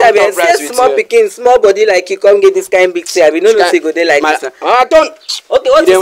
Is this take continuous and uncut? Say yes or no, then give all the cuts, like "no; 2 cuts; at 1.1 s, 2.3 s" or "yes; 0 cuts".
yes; 0 cuts